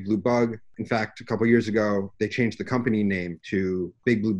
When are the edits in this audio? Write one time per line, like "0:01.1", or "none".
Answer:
0:02.1
0:03.3

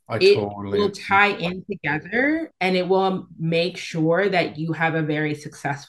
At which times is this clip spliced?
none

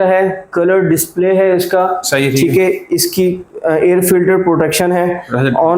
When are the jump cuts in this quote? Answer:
none

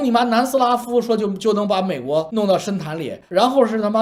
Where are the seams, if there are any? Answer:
none

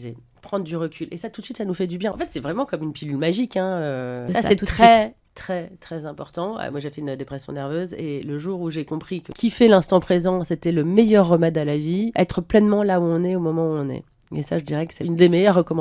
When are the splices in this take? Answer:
0:02.1
0:04.2
0:09.3
0:12.1
0:15.0

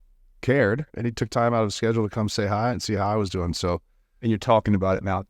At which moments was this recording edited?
0:00.9
0:02.7
0:04.1

